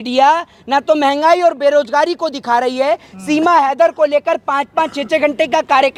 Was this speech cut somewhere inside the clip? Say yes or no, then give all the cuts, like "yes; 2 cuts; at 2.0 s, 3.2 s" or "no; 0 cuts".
no; 0 cuts